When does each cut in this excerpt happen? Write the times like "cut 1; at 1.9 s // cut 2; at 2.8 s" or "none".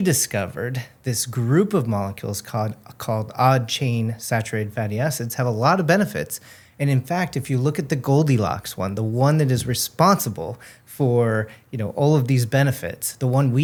none